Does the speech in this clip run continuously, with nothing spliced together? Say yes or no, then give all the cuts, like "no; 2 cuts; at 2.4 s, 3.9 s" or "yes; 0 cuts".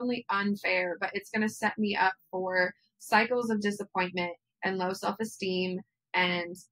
yes; 0 cuts